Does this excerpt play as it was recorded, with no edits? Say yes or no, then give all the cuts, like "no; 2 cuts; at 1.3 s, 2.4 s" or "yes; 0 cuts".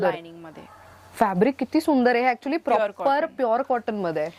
yes; 0 cuts